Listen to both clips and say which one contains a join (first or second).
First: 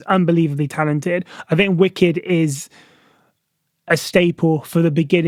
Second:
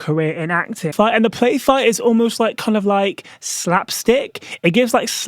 second